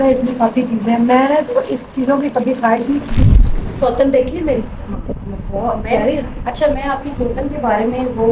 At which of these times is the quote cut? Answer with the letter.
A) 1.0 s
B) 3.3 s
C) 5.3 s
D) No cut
B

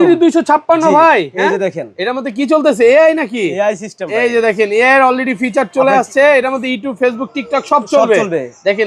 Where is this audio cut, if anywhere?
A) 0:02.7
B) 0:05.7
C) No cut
C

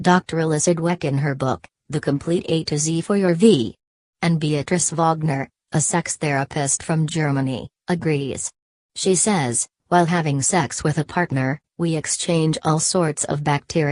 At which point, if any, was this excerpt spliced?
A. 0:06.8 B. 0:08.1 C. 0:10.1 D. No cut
C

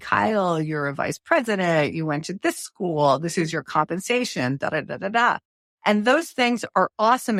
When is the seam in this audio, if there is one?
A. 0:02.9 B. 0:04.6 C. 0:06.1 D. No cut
D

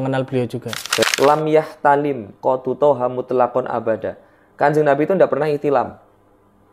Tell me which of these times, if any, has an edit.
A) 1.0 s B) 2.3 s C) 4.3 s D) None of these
A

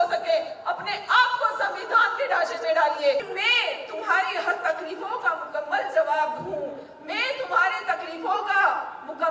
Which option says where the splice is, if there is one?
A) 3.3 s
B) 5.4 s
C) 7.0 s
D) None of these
A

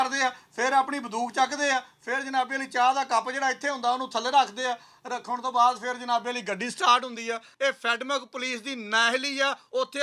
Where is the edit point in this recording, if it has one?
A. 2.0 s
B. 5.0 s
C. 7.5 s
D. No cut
C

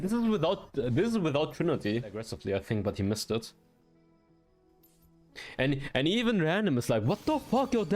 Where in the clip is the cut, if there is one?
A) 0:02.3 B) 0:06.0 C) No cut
A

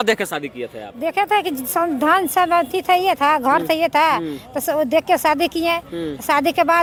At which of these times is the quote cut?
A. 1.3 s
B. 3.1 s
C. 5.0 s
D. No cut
D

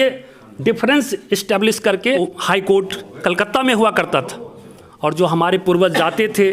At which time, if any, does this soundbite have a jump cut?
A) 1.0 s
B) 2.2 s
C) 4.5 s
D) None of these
B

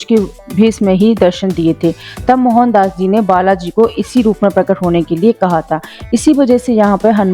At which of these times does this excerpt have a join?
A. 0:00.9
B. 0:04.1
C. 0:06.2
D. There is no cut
D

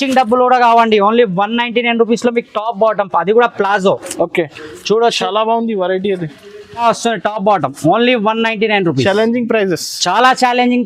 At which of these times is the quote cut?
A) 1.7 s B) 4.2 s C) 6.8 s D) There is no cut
C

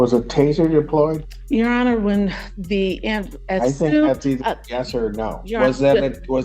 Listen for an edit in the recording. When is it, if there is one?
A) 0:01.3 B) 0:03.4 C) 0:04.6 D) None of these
A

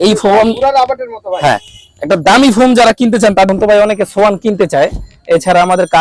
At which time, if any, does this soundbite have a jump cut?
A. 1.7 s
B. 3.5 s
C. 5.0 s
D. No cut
B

